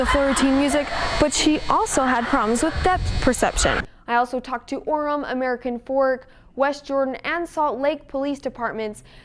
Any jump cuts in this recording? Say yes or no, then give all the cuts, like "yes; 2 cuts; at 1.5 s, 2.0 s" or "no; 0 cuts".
yes; 1 cut; at 3.8 s